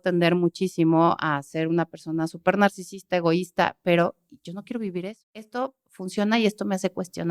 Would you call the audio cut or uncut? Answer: cut